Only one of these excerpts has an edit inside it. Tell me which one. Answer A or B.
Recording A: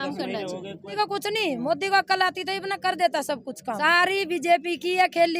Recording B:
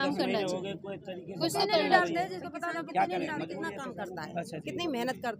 A